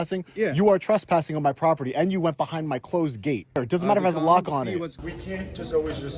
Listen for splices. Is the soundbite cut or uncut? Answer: cut